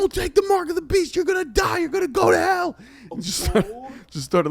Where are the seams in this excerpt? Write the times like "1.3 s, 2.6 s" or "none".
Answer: none